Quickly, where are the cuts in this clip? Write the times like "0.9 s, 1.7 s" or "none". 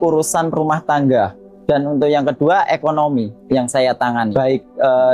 1.5 s, 3.4 s, 4.3 s